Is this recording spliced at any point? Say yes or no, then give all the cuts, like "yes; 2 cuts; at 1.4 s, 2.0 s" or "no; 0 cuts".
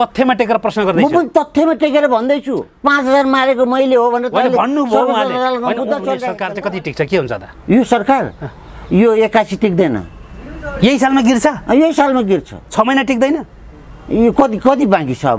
yes; 1 cut; at 6.4 s